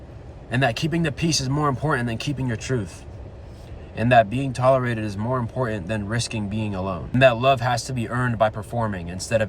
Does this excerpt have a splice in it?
yes; 1 cut; at 7.1 s

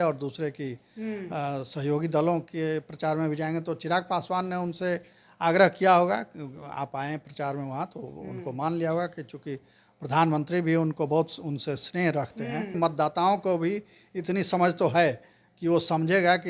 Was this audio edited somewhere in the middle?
yes; 1 cut; at 12.8 s

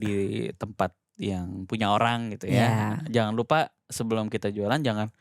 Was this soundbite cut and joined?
no; 0 cuts

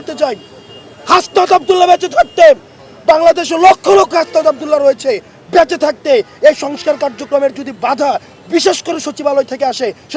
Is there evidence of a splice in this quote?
no; 0 cuts

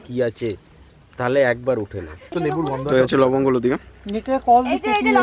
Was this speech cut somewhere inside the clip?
yes; 1 cut; at 2.4 s

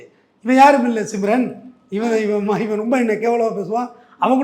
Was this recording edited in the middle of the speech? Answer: no; 0 cuts

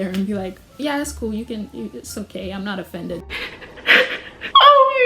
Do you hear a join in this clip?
yes; 1 cut; at 3.3 s

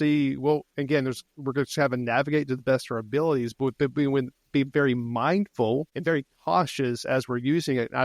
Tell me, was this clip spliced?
yes; 1 cut; at 5.9 s

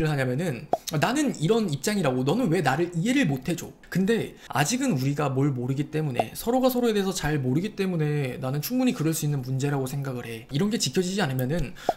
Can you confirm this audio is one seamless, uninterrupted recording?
no; 3 cuts; at 3.8 s, 4.5 s, 10.5 s

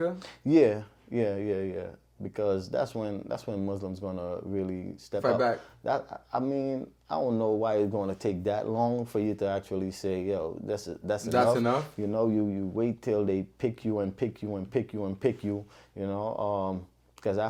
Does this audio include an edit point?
no; 0 cuts

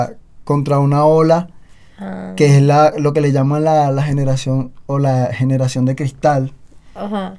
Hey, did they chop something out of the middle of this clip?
no; 0 cuts

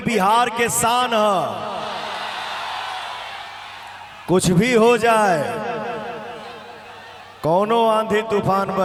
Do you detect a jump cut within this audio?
no; 0 cuts

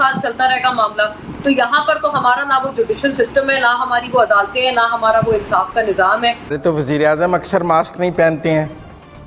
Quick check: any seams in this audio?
yes; 1 cut; at 6.5 s

